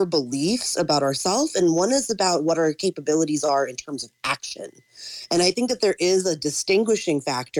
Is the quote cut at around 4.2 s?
no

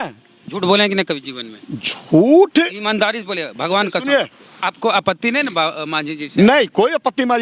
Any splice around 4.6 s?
yes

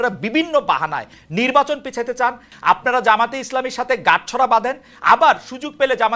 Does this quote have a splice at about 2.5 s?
yes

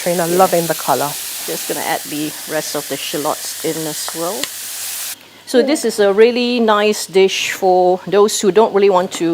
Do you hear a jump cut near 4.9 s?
yes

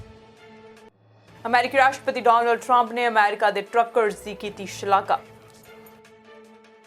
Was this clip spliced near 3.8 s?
no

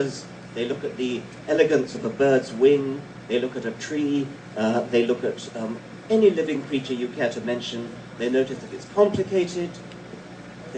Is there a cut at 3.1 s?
no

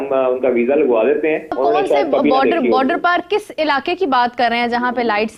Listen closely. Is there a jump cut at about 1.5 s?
yes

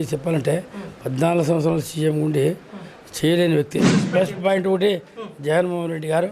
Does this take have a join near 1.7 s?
no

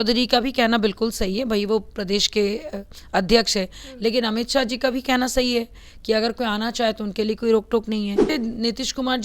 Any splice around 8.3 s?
yes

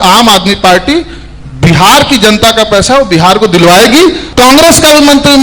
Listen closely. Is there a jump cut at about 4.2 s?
yes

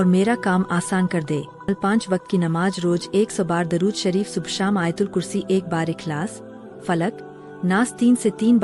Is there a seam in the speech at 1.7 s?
yes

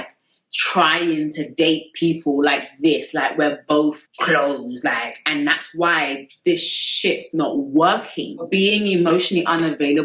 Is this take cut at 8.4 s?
yes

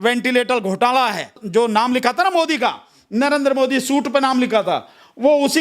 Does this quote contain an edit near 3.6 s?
no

